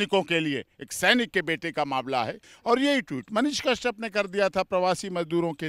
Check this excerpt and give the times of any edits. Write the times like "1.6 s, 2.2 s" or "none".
2.5 s